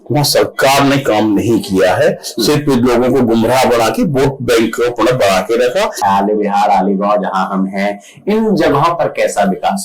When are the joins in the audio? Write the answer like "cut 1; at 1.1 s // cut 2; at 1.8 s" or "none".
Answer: cut 1; at 6.0 s